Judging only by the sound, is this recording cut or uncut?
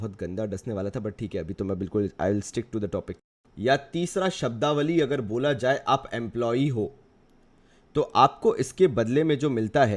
cut